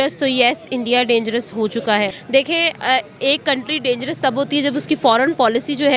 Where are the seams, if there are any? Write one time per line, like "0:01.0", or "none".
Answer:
0:02.1

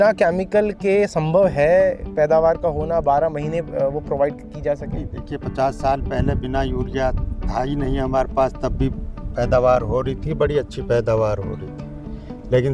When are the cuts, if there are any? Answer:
none

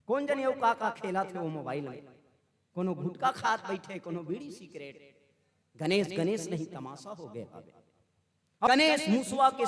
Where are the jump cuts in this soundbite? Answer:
0:08.7

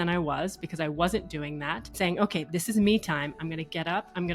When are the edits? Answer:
0:01.8

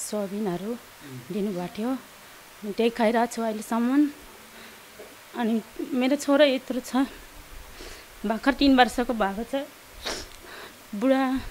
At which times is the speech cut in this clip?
none

